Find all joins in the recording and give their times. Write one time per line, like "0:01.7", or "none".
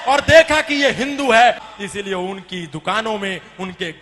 0:01.7